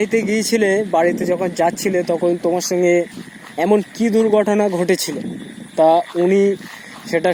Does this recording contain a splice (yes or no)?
no